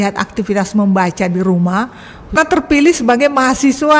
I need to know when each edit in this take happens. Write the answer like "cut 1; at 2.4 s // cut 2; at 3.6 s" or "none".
cut 1; at 2.3 s

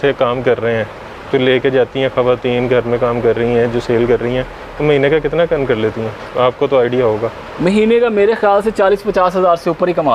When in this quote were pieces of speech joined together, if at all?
none

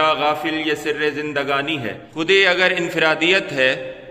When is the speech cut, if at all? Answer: cut 1; at 2.0 s

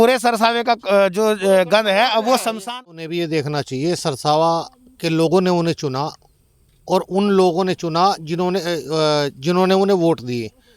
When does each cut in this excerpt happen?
cut 1; at 2.8 s

